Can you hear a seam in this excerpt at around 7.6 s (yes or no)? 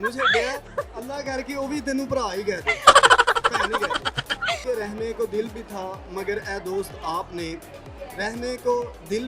no